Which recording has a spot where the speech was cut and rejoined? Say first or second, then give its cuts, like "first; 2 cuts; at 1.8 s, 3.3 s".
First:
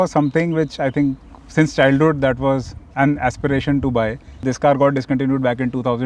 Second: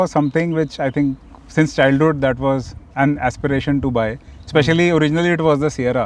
first; 1 cut; at 4.3 s